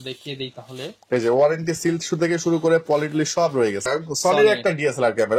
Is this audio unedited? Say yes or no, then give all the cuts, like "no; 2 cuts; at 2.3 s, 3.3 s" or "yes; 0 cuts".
no; 1 cut; at 3.8 s